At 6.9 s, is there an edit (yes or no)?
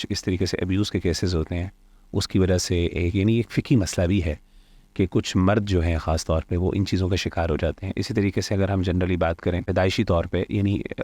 no